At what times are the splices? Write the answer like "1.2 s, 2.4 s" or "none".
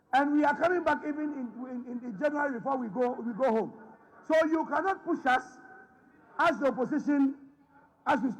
none